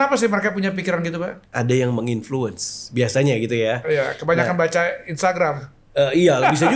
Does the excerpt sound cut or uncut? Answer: cut